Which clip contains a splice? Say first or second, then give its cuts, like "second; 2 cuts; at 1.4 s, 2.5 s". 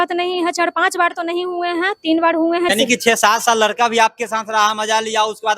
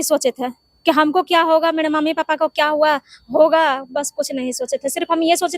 first; 1 cut; at 2.7 s